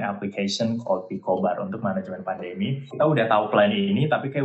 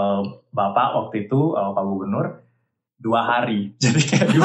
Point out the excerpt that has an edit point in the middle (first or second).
first